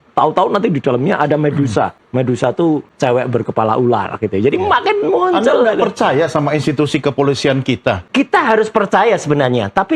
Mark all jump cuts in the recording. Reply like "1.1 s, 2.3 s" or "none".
2.0 s, 2.9 s, 8.0 s